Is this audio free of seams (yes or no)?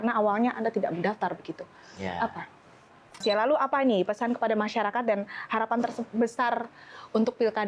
no